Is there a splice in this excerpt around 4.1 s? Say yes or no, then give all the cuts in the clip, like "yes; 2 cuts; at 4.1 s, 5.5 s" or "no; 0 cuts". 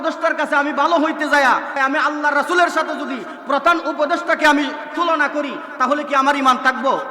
no; 1 cut; at 1.8 s